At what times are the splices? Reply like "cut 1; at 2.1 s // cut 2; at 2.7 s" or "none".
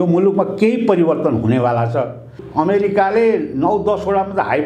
cut 1; at 2.4 s